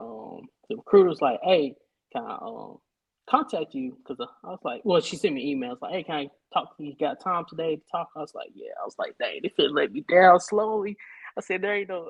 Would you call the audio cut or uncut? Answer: uncut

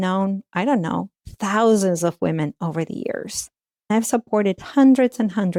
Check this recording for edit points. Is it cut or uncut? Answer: uncut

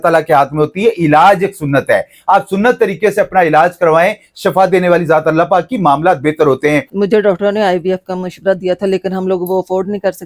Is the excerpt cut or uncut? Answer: cut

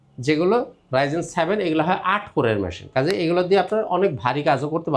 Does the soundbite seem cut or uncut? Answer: uncut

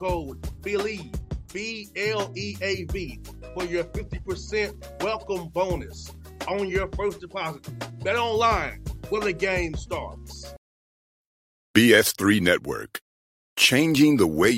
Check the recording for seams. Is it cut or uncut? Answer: cut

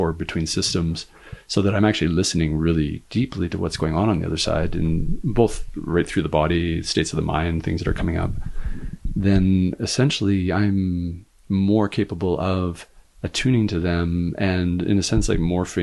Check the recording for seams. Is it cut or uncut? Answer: uncut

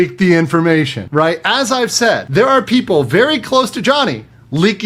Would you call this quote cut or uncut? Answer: cut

